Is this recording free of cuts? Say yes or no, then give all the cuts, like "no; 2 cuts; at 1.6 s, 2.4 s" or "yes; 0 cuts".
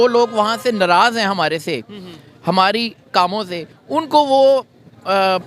yes; 0 cuts